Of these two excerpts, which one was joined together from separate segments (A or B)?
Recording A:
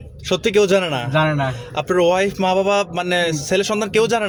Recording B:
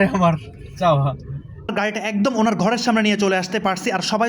B